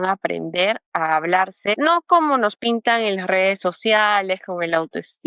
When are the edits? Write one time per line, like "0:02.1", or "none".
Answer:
0:01.8